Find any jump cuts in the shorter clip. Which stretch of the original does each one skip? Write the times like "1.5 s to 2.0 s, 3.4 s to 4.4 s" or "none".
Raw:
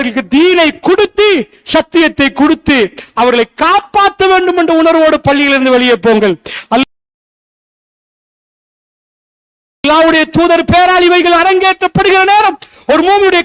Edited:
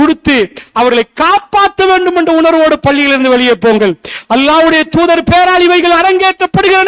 6.8 s to 9.8 s